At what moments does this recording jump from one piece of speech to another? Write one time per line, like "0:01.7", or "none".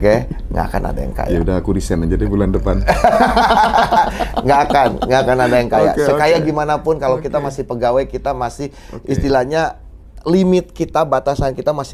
none